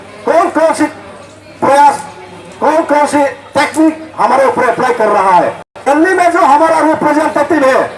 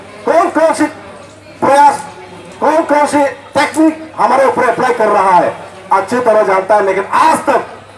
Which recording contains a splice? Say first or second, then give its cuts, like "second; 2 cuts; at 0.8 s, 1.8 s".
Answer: first; 1 cut; at 5.7 s